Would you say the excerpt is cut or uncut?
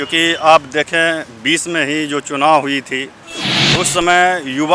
uncut